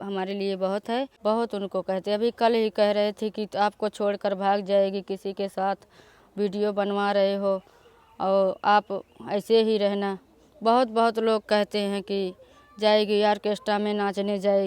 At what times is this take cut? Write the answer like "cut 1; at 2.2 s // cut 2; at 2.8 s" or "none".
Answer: cut 1; at 1.1 s